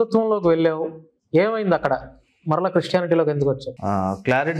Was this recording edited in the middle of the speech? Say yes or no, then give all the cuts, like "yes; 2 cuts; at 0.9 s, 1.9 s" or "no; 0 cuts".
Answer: yes; 1 cut; at 3.7 s